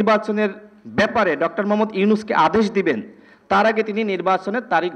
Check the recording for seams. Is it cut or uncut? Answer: uncut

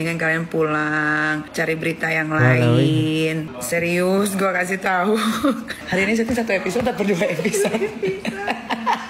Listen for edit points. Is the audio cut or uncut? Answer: uncut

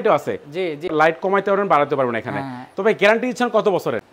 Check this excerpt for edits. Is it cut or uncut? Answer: cut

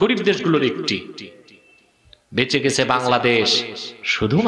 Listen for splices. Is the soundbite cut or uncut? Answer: uncut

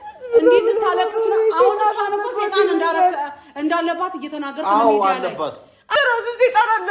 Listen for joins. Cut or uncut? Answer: cut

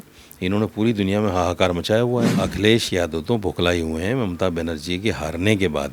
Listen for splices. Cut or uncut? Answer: cut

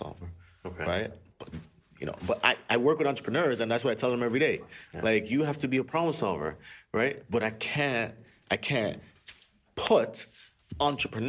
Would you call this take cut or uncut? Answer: uncut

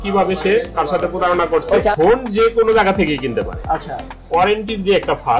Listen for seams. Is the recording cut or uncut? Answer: cut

